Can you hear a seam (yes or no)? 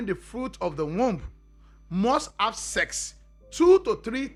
no